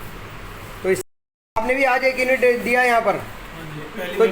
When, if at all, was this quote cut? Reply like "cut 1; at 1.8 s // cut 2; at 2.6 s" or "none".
cut 1; at 1.0 s